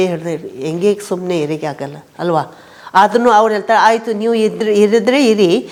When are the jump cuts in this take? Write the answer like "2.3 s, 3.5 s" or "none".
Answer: none